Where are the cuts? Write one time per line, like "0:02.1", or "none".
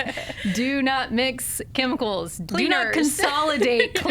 0:02.4